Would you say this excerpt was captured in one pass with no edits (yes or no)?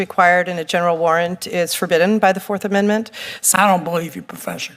no